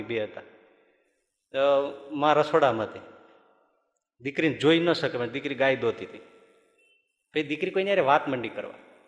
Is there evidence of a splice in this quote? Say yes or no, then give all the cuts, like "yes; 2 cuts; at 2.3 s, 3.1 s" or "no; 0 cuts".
no; 0 cuts